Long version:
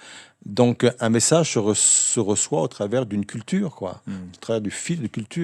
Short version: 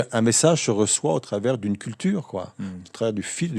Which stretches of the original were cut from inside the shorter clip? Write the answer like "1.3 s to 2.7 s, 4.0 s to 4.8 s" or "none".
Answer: 1.8 s to 2.4 s